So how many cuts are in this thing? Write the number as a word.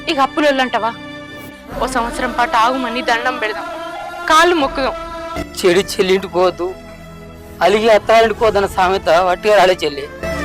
one